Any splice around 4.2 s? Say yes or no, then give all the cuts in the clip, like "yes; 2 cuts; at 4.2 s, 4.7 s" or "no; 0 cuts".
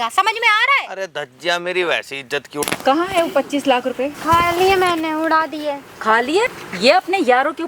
yes; 3 cuts; at 2.5 s, 4.2 s, 6.6 s